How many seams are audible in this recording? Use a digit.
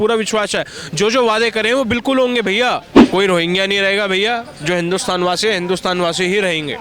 1